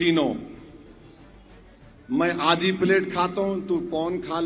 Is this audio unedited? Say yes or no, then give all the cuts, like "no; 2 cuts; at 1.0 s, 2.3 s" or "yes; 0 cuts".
yes; 0 cuts